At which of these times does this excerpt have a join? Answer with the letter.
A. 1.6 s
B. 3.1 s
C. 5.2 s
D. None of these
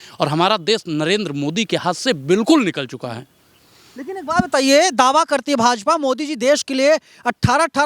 D